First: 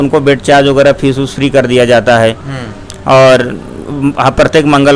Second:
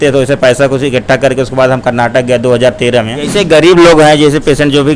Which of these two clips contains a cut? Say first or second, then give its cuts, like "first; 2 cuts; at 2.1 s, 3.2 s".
second; 1 cut; at 3.2 s